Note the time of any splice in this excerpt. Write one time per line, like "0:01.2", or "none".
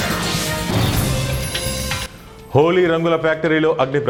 none